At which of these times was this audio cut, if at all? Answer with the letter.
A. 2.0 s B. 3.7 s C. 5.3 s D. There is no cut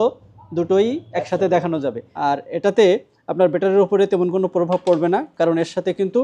A